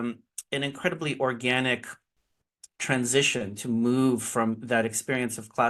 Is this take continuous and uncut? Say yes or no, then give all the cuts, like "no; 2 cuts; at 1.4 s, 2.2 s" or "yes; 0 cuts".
yes; 0 cuts